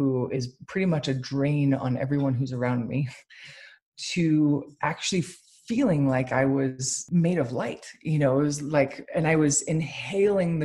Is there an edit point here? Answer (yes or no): yes